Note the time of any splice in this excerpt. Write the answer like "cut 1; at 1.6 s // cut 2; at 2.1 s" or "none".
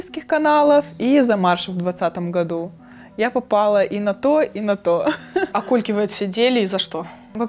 none